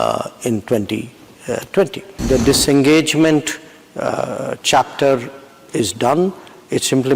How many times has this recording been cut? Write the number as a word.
one